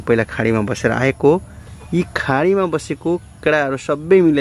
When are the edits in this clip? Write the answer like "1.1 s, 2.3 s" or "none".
none